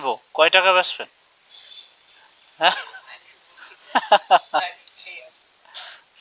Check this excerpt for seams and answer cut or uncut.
uncut